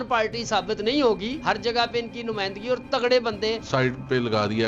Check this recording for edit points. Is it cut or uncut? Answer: cut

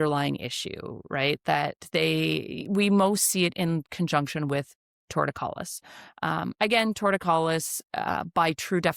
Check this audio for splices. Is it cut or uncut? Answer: uncut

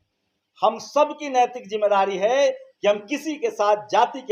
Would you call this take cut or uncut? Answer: uncut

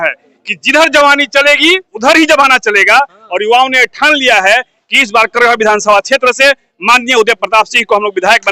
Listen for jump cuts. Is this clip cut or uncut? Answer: uncut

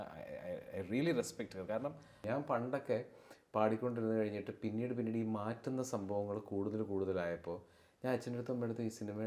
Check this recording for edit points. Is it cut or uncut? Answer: cut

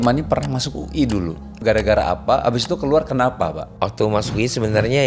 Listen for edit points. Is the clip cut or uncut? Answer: cut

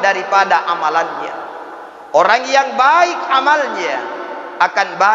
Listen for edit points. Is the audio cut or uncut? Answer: uncut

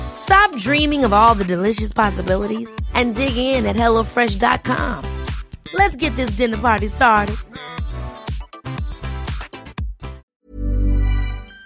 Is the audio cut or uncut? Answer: cut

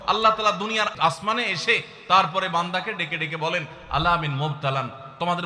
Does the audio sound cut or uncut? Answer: cut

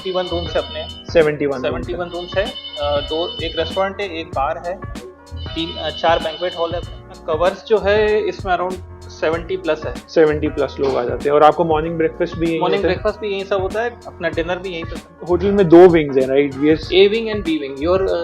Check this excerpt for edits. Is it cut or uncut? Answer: cut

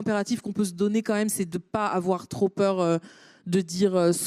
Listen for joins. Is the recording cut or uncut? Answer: cut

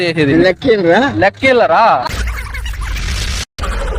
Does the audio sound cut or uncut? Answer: uncut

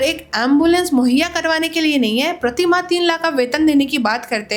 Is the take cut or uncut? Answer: uncut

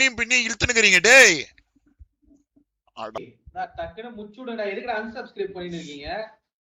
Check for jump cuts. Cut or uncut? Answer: cut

